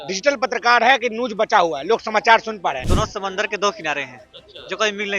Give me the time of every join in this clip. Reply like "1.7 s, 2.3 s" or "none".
2.9 s